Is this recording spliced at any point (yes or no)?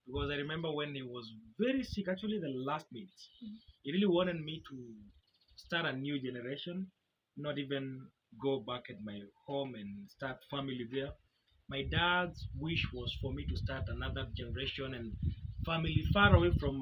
no